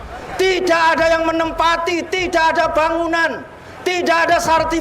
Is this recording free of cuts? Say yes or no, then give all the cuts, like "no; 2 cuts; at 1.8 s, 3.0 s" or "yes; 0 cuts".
yes; 0 cuts